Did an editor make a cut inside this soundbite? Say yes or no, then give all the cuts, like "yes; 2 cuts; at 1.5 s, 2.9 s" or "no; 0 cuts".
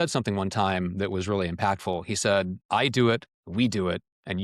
yes; 2 cuts; at 2.6 s, 3.4 s